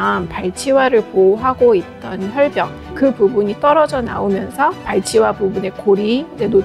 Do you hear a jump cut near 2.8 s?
yes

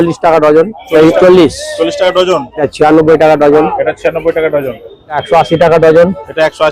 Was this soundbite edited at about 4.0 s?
no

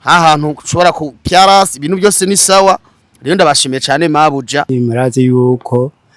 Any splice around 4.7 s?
yes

